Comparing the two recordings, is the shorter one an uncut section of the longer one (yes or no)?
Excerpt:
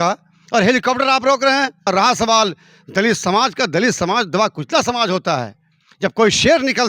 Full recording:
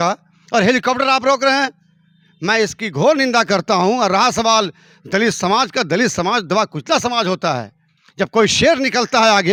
no